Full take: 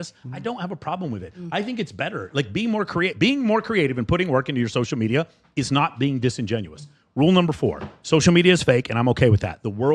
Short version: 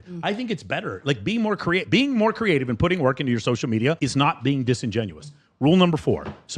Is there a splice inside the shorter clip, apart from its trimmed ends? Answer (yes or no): yes